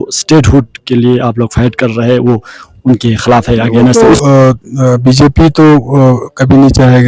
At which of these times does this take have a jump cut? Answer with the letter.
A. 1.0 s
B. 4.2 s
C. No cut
B